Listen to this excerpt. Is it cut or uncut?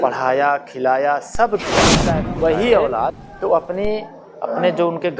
cut